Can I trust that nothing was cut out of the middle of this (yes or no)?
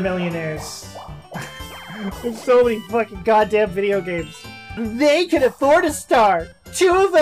yes